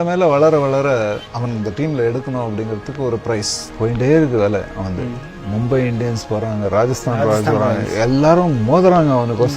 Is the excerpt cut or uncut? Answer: cut